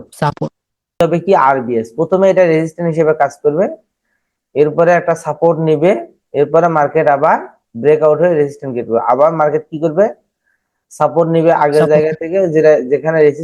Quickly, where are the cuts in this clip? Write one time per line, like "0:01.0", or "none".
0:01.0